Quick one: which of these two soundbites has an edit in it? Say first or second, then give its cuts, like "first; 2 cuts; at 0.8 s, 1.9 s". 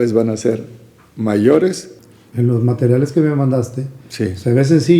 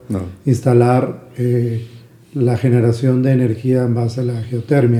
first; 1 cut; at 1.9 s